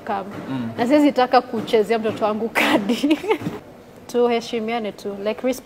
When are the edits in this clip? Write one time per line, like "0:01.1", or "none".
0:03.5